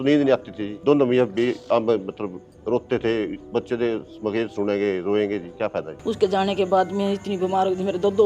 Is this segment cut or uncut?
cut